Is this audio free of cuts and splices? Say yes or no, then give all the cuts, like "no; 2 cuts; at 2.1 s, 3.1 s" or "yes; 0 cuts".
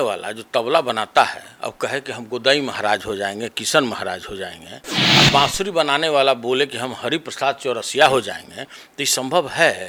yes; 0 cuts